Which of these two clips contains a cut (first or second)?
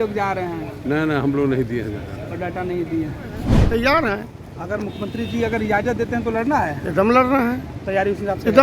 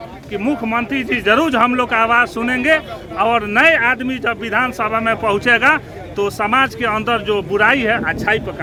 first